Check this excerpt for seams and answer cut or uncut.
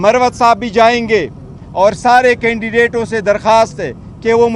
uncut